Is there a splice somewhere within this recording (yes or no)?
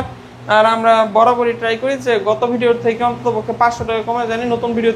no